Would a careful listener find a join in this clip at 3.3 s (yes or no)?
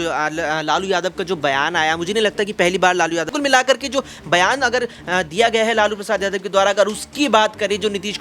yes